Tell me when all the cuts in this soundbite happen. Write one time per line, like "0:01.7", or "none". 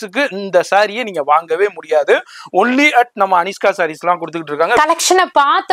0:04.8